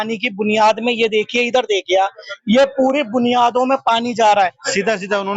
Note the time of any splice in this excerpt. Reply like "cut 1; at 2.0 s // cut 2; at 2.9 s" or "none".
cut 1; at 4.4 s